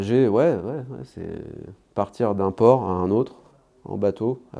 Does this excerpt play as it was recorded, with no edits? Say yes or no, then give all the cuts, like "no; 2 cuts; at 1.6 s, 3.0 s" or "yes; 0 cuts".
yes; 0 cuts